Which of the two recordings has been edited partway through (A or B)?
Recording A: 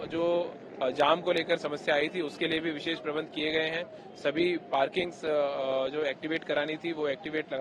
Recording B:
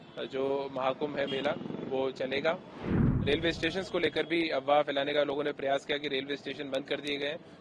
B